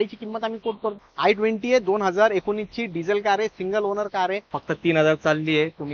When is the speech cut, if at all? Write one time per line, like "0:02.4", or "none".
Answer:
0:00.9
0:04.5